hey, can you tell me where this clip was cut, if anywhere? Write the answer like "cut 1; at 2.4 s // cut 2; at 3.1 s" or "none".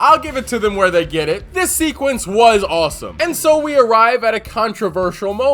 cut 1; at 3.1 s